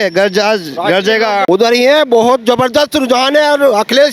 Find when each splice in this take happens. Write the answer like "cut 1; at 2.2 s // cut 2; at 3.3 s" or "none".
cut 1; at 1.5 s